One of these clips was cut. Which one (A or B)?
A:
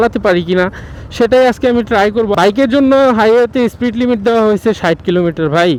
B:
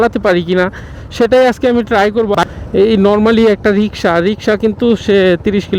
B